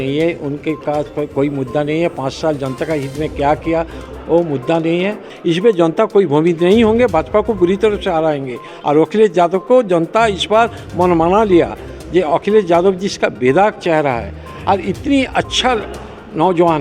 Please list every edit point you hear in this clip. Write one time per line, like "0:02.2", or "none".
0:05.3